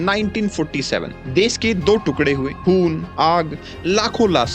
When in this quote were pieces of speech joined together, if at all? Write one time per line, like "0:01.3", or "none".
0:01.2